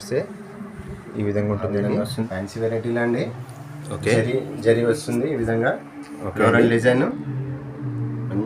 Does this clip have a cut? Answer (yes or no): yes